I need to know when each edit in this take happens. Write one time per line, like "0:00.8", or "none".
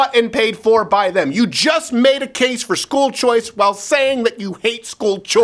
none